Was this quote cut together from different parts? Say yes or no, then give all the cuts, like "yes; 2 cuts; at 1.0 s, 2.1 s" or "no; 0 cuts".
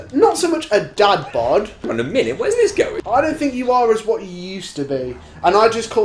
yes; 2 cuts; at 1.8 s, 2.9 s